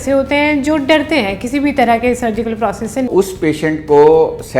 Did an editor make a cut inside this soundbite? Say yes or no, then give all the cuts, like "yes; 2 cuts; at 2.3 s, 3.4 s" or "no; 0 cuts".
yes; 1 cut; at 3.1 s